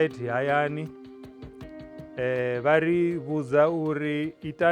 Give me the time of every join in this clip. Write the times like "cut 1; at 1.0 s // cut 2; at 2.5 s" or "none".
none